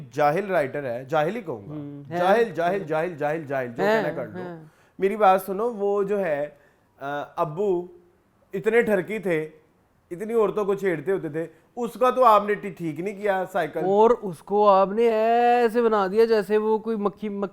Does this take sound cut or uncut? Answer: uncut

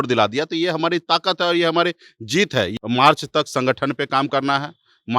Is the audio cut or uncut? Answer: cut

